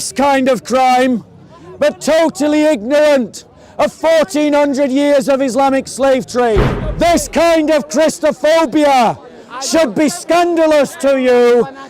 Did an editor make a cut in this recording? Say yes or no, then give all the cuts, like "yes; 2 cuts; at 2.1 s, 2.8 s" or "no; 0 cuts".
yes; 1 cut; at 6.8 s